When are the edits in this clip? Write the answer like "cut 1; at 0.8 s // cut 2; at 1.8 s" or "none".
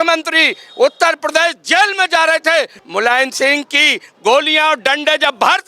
cut 1; at 2.8 s